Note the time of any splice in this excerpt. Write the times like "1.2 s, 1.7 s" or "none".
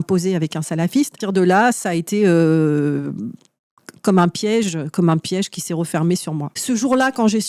1.2 s, 6.5 s